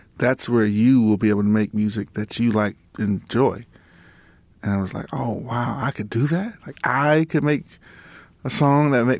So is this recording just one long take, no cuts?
no; 1 cut; at 2.9 s

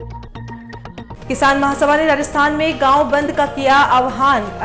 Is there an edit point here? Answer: yes; 1 cut; at 1.0 s

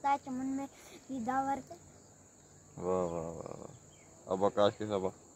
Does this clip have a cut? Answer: no; 0 cuts

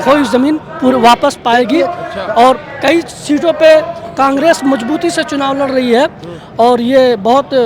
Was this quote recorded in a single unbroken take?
yes; 0 cuts

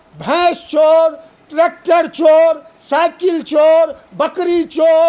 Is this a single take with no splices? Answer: yes; 0 cuts

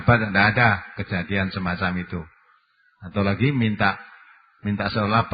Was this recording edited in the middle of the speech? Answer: no; 0 cuts

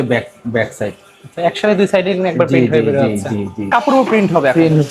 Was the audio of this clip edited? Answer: yes; 1 cut; at 3.7 s

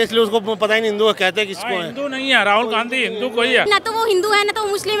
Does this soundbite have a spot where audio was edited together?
yes; 1 cut; at 3.7 s

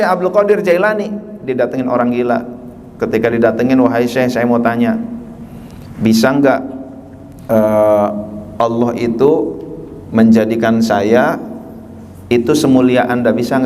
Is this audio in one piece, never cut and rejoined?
yes; 0 cuts

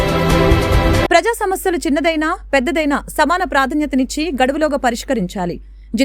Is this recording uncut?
no; 1 cut; at 1.0 s

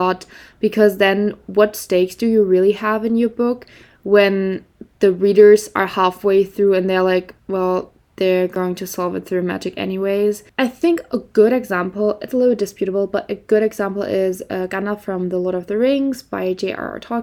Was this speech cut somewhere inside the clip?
no; 0 cuts

